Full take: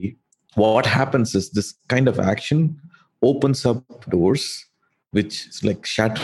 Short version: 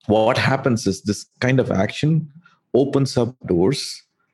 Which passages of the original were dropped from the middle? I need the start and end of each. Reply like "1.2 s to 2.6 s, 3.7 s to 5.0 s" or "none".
3.9 s to 4.0 s